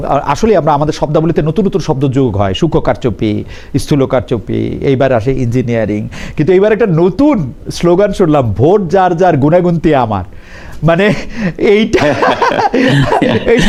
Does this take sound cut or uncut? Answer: uncut